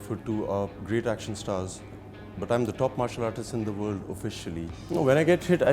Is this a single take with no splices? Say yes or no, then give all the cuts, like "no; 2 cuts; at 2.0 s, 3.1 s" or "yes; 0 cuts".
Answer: no; 1 cut; at 4.8 s